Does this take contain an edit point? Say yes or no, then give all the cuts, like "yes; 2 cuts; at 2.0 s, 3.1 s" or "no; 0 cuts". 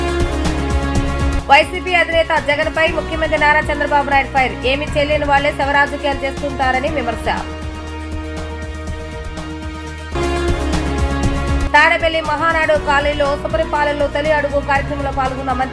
yes; 1 cut; at 1.4 s